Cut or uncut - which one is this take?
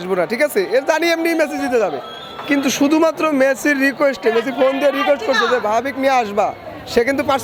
uncut